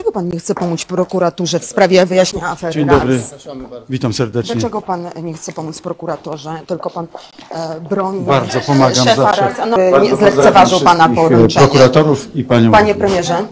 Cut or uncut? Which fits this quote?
cut